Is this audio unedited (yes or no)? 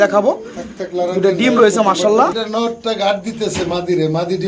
no